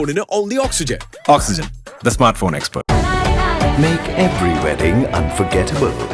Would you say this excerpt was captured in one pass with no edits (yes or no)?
no